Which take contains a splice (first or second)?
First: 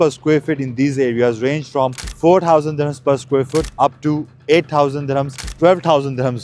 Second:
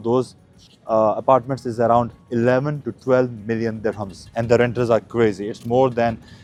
first